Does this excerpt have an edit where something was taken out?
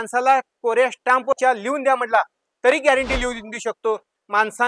yes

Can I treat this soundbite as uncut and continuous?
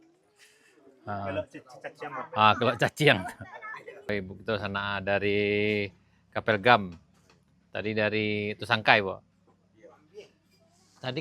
no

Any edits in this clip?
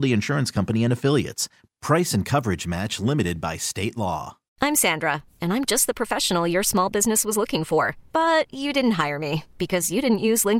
yes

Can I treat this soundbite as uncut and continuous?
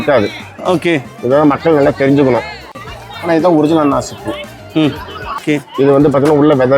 no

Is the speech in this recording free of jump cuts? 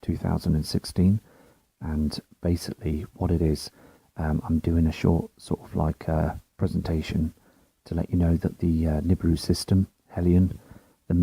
yes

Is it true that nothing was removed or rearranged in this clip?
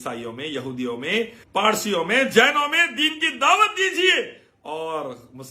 no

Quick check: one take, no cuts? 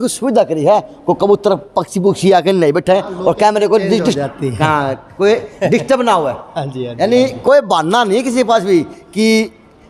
yes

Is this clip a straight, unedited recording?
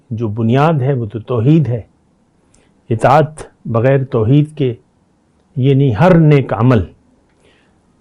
yes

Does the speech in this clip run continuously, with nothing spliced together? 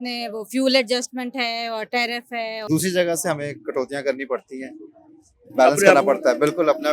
no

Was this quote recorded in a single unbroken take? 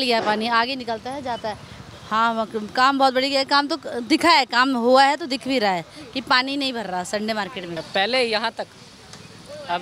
no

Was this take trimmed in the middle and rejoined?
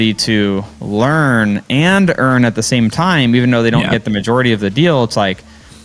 no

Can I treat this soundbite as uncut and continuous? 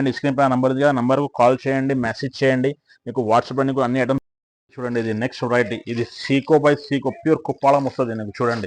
no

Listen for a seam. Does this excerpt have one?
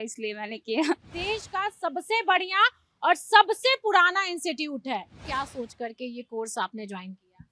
yes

